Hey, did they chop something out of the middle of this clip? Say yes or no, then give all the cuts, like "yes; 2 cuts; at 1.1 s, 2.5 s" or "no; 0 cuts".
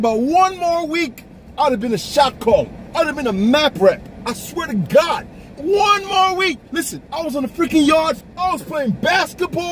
yes; 1 cut; at 8.2 s